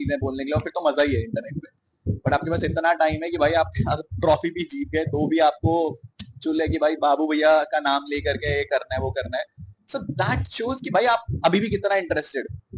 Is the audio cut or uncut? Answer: uncut